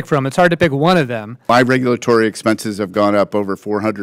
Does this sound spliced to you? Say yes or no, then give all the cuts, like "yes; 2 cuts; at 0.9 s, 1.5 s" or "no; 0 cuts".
yes; 1 cut; at 1.4 s